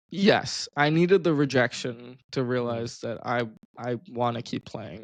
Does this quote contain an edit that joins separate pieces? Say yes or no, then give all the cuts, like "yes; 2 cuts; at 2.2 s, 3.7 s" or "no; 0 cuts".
no; 0 cuts